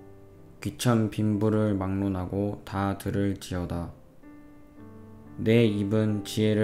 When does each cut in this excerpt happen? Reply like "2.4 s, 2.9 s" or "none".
5.2 s